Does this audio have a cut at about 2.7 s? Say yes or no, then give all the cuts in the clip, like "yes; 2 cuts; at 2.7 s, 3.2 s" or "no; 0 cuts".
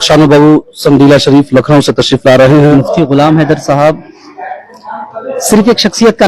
yes; 1 cut; at 2.7 s